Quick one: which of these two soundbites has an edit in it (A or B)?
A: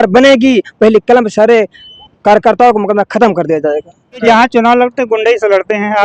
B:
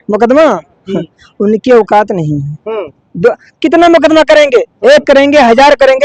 A